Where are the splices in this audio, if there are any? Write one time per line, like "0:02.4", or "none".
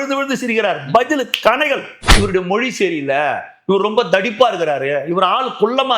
0:02.0